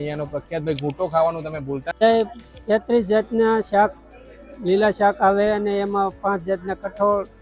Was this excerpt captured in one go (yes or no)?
no